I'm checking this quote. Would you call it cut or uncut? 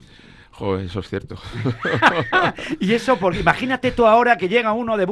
uncut